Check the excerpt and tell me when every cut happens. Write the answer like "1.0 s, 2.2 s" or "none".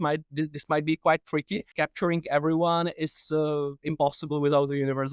1.8 s